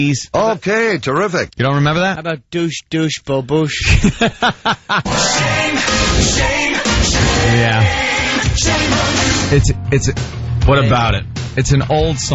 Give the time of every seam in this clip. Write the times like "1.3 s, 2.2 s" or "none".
6.3 s